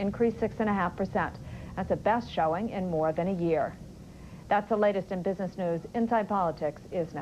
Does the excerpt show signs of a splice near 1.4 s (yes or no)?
yes